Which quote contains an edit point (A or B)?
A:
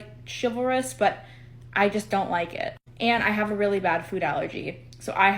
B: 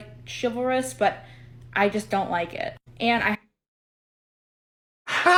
A